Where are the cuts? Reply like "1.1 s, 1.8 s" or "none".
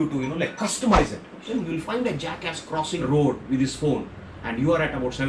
1.4 s, 3.0 s